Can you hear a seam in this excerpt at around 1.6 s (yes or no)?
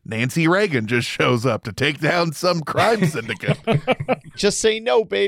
no